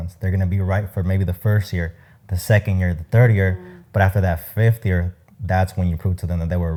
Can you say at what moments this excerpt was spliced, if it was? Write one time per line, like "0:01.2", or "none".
none